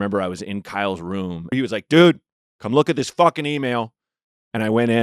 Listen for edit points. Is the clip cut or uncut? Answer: cut